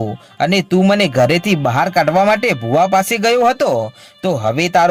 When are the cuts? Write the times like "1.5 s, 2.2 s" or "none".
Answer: none

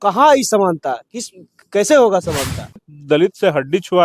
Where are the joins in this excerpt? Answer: 2.9 s

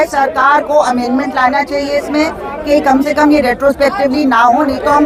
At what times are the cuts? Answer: none

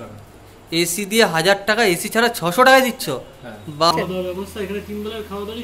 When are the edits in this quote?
3.9 s

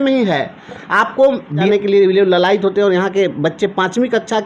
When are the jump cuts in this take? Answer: 1.7 s

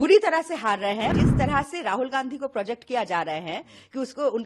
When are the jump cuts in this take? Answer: 1.1 s

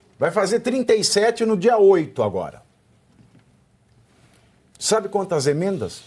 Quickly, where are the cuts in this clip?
none

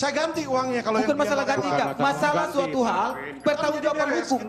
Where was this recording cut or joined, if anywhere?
none

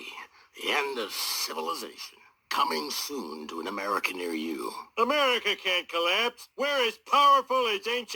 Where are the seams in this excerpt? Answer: 4.8 s

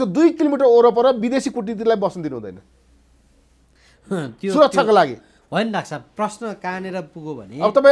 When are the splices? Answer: none

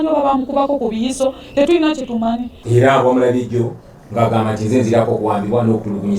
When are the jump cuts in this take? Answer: 2.6 s

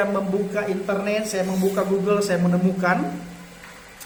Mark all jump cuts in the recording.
none

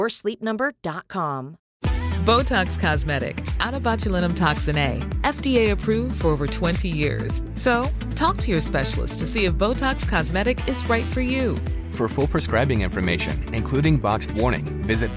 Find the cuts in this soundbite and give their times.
1.6 s

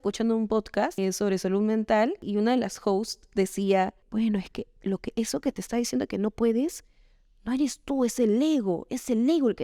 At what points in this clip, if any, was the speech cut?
1.0 s, 2.2 s, 4.0 s

